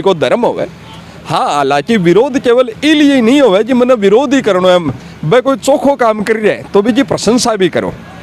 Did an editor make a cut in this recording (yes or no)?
no